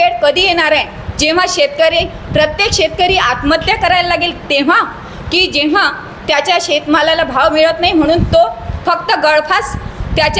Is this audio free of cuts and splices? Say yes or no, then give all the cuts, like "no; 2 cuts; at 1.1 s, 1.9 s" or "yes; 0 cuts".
yes; 0 cuts